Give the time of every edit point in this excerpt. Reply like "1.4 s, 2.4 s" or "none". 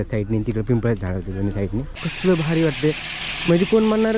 2.1 s